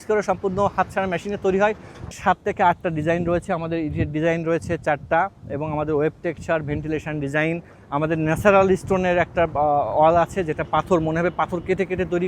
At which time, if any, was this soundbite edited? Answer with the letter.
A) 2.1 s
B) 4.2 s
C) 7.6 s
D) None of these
A